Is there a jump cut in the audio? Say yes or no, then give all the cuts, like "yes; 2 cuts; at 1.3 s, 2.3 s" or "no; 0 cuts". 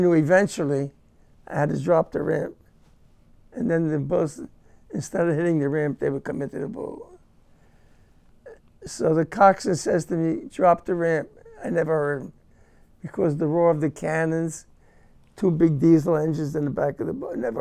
no; 0 cuts